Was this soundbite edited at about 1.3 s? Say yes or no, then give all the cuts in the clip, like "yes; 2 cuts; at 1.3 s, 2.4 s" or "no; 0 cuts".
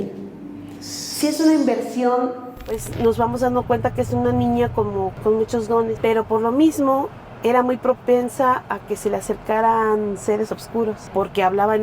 no; 4 cuts; at 2.9 s, 5.1 s, 6.0 s, 11.0 s